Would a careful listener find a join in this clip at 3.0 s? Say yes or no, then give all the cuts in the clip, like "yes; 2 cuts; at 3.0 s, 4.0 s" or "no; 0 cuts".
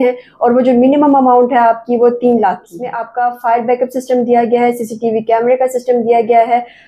yes; 1 cut; at 3.0 s